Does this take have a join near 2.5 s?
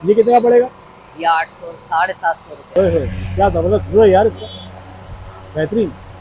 yes; 1 cut; at 2.5 s

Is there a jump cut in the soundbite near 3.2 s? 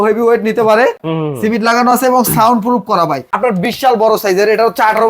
yes; 2 cuts; at 1.0 s, 3.2 s

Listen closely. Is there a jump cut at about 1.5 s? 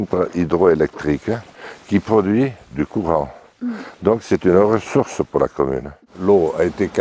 yes; 2 cuts; at 1.5 s, 6.0 s

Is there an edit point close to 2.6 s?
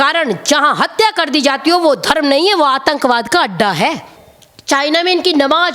no; 1 cut; at 4.2 s

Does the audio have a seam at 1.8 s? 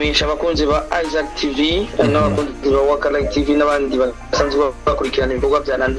no; 0 cuts

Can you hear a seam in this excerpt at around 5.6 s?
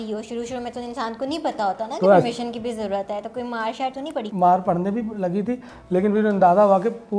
no; 1 cut; at 4.2 s

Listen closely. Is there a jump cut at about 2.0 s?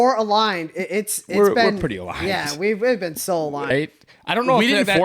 no; 1 cut; at 3.7 s

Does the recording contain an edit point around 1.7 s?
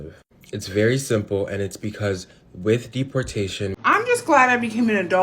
no; 1 cut; at 3.8 s

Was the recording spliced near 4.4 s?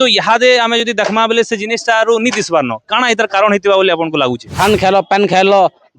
yes; 1 cut; at 4.4 s

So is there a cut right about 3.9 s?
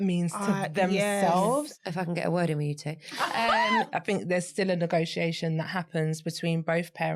yes; 2 cuts; at 1.7 s, 3.9 s

